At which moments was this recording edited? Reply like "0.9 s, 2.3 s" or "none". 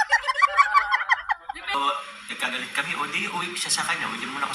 1.7 s